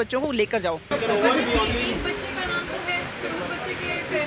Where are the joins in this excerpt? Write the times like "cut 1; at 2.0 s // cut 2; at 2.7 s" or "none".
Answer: cut 1; at 0.9 s